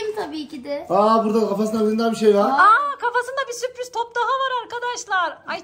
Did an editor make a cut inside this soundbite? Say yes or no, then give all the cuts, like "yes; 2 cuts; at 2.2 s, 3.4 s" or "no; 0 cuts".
no; 0 cuts